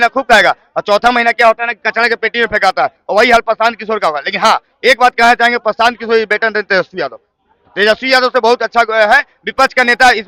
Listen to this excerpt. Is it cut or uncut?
uncut